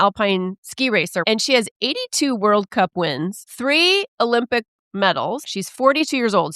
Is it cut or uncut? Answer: cut